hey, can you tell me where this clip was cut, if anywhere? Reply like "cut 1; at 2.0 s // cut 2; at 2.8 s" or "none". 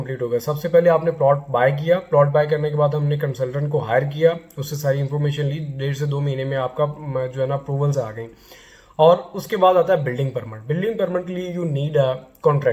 none